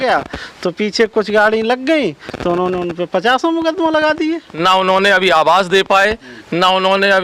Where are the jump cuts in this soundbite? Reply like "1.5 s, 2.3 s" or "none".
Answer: 4.5 s